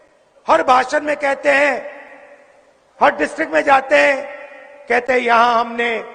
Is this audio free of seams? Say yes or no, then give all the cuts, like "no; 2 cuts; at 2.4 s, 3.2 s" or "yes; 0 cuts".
yes; 0 cuts